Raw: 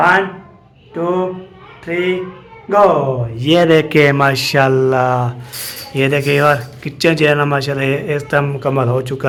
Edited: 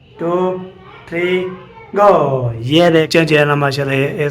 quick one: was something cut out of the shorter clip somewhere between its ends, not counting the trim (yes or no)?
yes